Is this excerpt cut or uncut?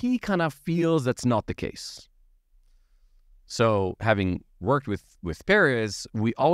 uncut